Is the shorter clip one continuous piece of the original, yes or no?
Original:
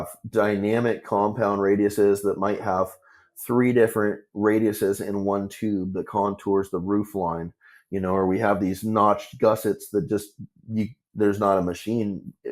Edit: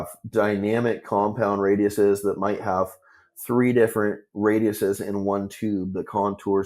yes